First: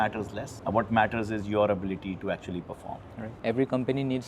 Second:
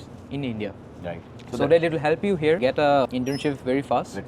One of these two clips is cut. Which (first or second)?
first